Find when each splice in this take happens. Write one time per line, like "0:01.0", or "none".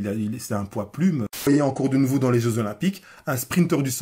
0:01.5